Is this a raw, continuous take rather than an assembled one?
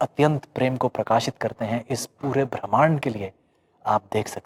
yes; 0 cuts

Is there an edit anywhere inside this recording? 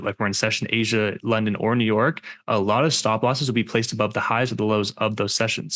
no; 0 cuts

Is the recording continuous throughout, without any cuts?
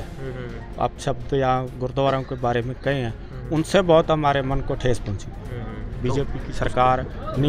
yes; 0 cuts

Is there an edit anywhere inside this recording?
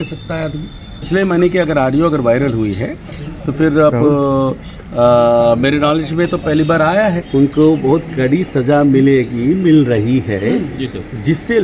yes; 2 cuts; at 1.1 s, 7.2 s

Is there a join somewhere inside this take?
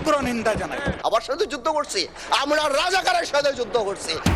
no; 0 cuts

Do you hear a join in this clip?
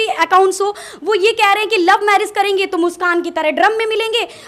no; 0 cuts

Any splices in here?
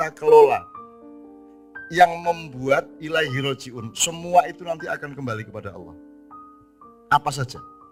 no; 0 cuts

